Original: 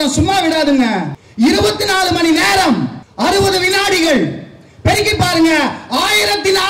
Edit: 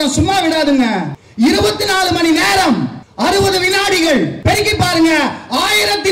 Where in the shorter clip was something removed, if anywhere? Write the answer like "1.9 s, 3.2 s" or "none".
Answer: 4.4 s